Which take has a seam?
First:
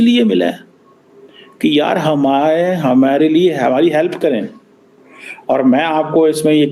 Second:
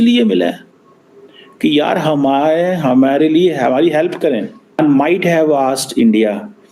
second; 1 cut; at 4.8 s

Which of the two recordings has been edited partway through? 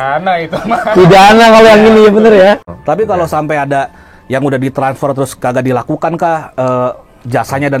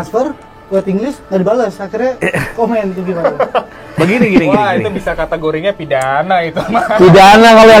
first; 1 cut; at 2.7 s

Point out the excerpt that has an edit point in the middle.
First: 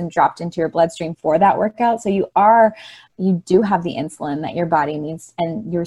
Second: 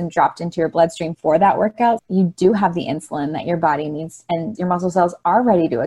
second; 2 cuts; at 2.0 s, 4.5 s

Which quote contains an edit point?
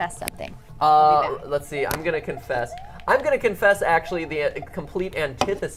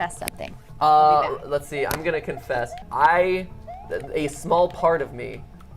second; 1 cut; at 2.8 s

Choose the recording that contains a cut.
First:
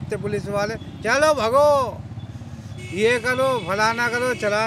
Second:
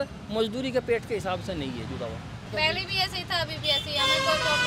second; 1 cut; at 2.5 s

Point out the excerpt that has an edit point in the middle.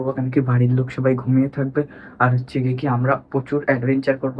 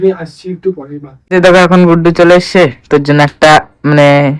second; 1 cut; at 1.1 s

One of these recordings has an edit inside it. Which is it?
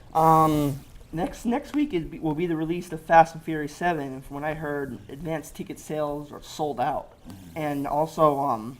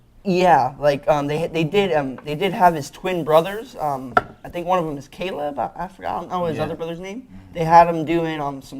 second; 1 cut; at 4.1 s

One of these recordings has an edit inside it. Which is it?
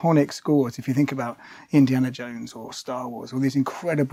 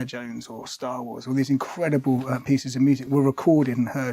second; 1 cut; at 3.1 s

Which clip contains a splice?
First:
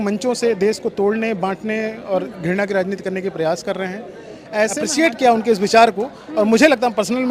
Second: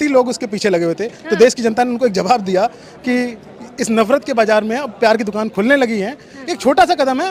first; 1 cut; at 4.9 s

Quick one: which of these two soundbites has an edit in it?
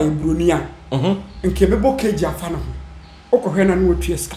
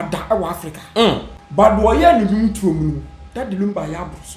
second; 1 cut; at 1.4 s

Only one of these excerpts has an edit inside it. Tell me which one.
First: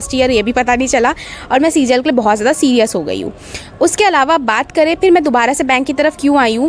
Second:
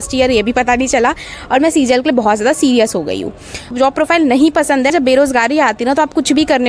second; 2 cuts; at 3.7 s, 4.9 s

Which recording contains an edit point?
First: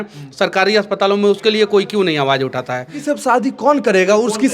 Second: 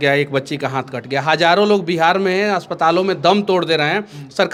first; 1 cut; at 3.0 s

